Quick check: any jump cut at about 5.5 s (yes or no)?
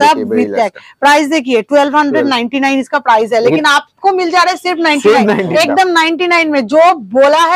yes